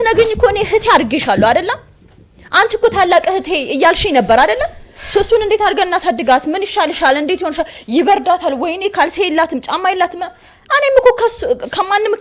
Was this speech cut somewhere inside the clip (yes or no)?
no